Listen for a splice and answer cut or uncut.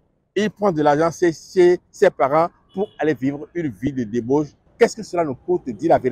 cut